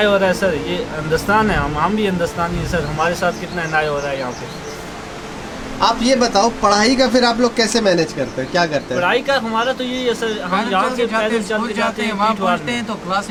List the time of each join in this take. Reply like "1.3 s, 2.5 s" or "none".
none